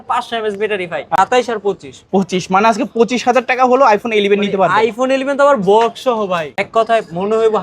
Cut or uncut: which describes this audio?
cut